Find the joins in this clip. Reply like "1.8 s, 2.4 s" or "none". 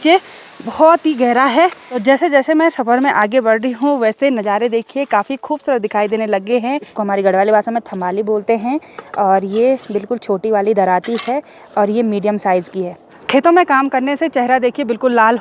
1.9 s, 6.9 s, 13.2 s